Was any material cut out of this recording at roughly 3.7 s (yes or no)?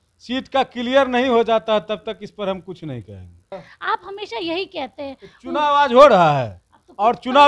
yes